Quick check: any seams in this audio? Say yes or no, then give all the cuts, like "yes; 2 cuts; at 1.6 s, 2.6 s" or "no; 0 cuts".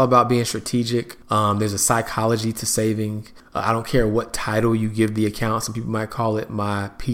no; 0 cuts